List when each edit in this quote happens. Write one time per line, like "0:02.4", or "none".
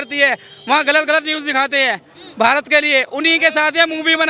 none